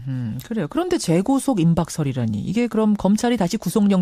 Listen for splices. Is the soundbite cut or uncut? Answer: cut